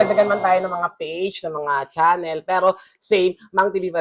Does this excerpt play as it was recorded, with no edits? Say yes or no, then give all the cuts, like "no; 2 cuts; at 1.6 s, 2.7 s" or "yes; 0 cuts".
yes; 0 cuts